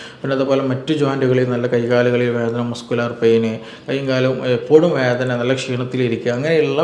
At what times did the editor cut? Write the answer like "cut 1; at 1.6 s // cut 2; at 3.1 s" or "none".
none

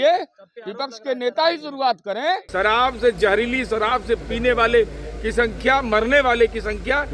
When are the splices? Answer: cut 1; at 2.5 s

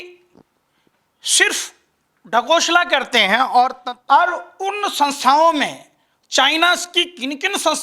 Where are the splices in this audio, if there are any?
cut 1; at 3.9 s

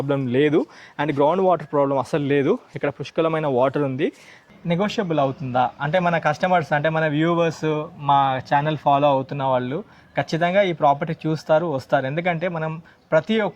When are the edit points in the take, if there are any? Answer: cut 1; at 4.5 s

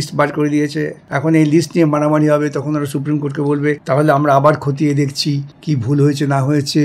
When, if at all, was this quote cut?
cut 1; at 1.0 s // cut 2; at 3.8 s // cut 3; at 5.5 s

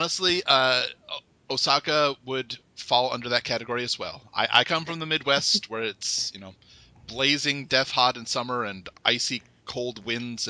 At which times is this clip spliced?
cut 1; at 3.1 s

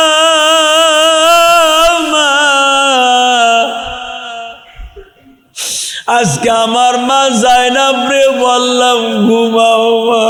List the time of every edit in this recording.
none

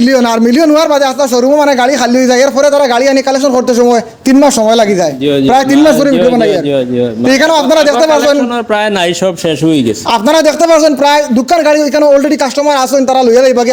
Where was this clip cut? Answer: none

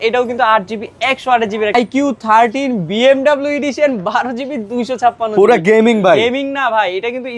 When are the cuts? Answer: cut 1; at 1.7 s

